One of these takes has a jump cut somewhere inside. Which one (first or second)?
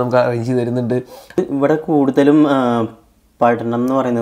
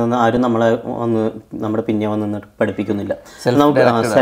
first